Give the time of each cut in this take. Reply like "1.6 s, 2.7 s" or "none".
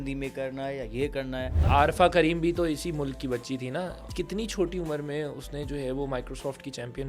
1.7 s, 4.1 s